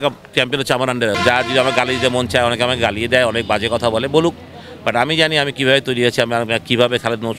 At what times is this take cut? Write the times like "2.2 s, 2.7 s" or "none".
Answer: 1.1 s